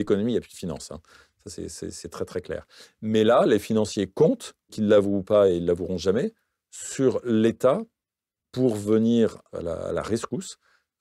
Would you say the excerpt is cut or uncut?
cut